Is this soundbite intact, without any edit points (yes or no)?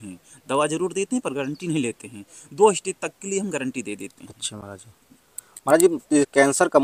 yes